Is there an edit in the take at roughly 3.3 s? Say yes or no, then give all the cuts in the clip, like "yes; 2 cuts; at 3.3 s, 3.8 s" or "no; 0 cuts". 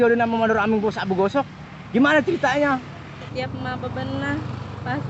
yes; 1 cut; at 3.3 s